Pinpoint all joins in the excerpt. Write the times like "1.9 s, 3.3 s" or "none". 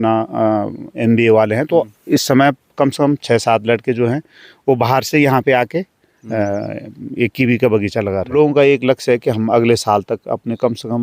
8.3 s